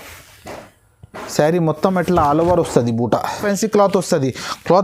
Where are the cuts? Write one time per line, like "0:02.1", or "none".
0:03.4